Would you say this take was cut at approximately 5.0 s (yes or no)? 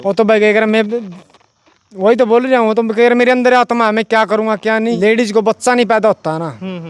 yes